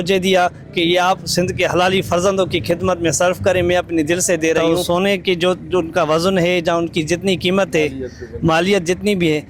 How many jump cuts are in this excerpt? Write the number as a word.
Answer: one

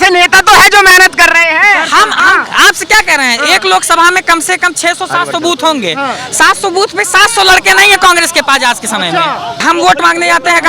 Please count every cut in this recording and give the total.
one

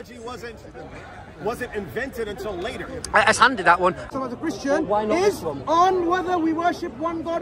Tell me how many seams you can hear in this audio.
one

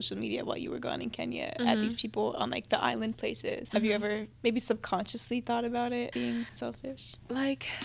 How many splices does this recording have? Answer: three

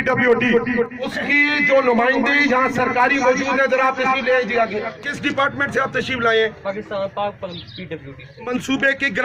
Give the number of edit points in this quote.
three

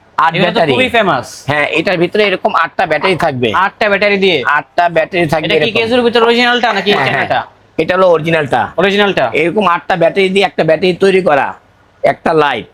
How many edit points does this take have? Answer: zero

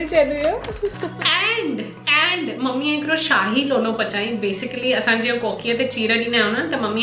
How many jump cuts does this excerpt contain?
one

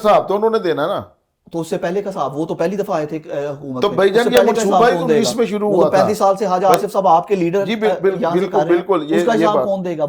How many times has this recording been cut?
zero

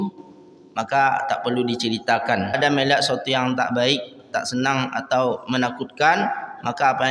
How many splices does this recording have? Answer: one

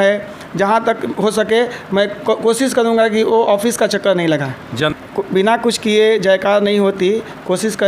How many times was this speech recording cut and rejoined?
one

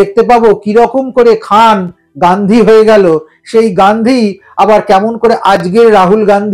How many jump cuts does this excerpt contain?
zero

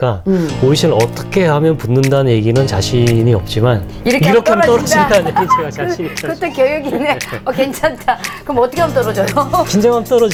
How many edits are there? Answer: zero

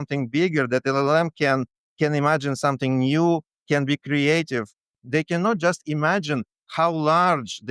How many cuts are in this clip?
one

